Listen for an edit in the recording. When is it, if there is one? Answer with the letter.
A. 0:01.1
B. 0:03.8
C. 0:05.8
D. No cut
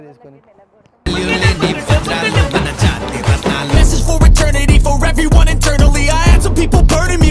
B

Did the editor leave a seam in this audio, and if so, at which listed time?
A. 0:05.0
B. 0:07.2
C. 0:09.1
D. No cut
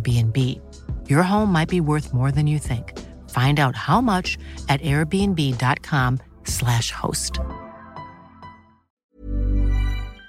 C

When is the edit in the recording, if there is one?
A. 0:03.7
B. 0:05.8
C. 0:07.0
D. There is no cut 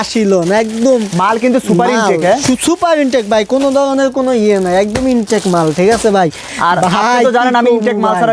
D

